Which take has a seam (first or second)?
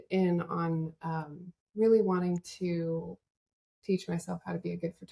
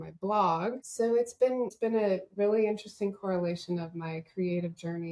second